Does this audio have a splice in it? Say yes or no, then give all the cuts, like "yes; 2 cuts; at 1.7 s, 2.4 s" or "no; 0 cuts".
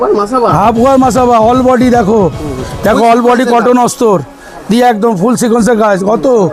no; 0 cuts